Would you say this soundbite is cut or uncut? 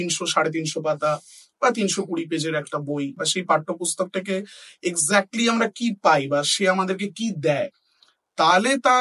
cut